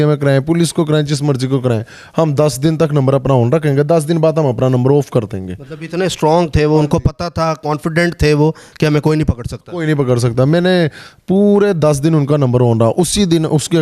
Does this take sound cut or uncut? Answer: uncut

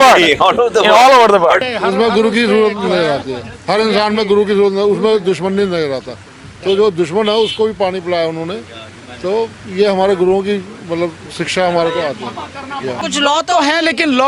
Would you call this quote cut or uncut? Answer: cut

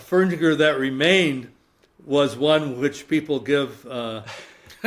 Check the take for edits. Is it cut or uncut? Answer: uncut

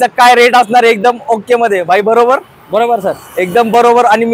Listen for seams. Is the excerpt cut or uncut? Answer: uncut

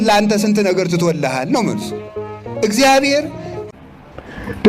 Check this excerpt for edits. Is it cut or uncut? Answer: cut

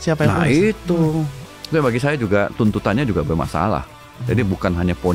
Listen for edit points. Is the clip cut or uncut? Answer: cut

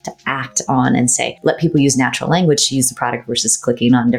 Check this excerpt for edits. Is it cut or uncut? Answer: cut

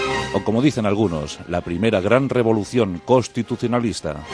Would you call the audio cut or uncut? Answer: cut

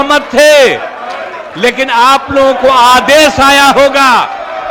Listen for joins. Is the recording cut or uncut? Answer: uncut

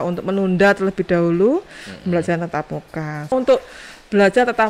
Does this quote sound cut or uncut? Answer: cut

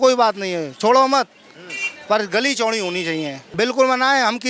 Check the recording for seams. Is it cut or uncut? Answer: cut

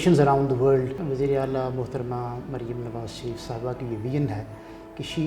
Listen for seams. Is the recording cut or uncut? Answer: cut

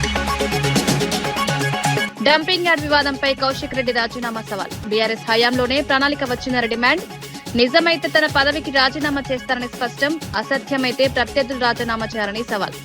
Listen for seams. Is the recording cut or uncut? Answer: cut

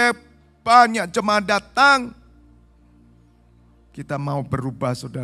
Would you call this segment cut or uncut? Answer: uncut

